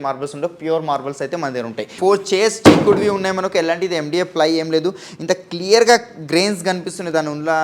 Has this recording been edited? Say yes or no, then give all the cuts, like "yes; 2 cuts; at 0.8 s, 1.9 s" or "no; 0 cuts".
yes; 1 cut; at 1.9 s